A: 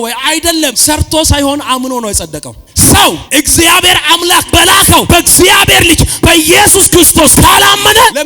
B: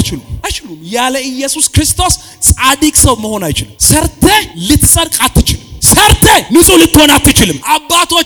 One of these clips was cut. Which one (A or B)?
A